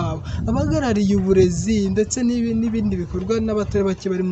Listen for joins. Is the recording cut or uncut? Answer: uncut